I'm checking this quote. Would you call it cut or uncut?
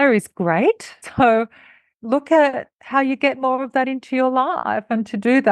cut